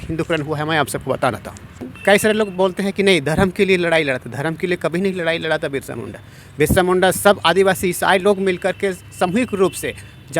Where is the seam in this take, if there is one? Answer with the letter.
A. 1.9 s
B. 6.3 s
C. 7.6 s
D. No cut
A